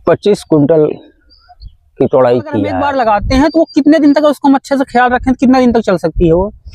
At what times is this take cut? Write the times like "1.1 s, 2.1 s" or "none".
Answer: 2.7 s